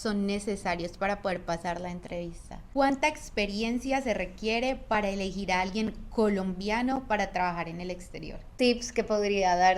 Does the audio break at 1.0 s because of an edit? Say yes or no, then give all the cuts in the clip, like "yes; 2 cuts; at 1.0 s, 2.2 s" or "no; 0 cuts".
no; 2 cuts; at 2.6 s, 8.5 s